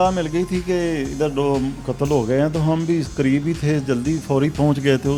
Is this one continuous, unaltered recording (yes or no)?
yes